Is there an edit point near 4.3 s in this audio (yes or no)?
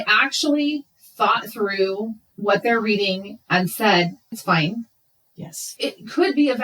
yes